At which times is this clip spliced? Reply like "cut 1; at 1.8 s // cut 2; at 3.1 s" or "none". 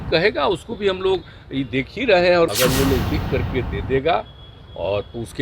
cut 1; at 2.5 s